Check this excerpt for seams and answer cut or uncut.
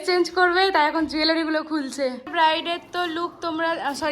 cut